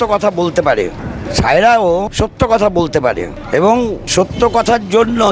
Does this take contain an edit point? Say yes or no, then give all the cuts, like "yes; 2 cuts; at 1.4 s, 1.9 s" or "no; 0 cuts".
yes; 4 cuts; at 1.1 s, 2.1 s, 3.4 s, 4.0 s